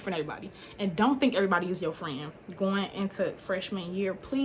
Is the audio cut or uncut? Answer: uncut